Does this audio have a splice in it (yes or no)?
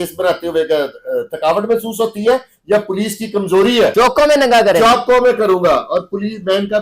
yes